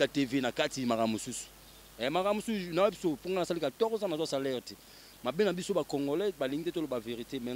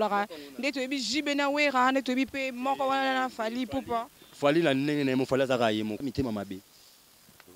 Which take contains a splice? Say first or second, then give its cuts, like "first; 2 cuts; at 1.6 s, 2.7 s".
second; 1 cut; at 6.0 s